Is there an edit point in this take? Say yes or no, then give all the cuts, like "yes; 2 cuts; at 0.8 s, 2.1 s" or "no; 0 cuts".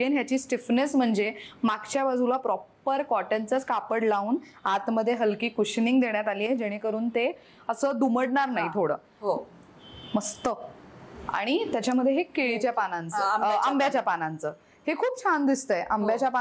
no; 0 cuts